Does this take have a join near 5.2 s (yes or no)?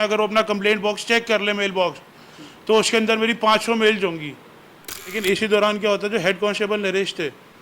yes